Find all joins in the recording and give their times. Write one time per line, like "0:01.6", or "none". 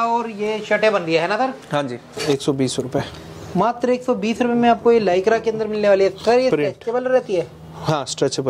0:02.2